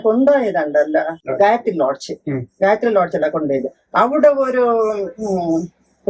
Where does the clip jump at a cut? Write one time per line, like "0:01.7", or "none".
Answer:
0:01.2